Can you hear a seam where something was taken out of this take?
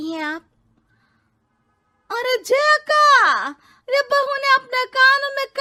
no; 0 cuts

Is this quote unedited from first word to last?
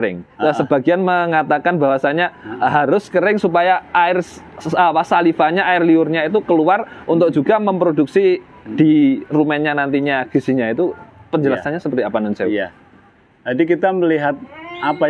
yes; 0 cuts

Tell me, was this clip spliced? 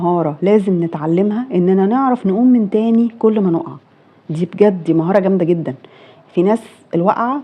no; 0 cuts

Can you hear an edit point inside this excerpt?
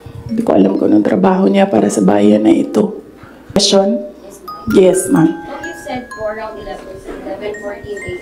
yes; 1 cut; at 3.6 s

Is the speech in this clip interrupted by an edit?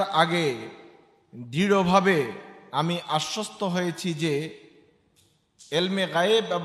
no; 0 cuts

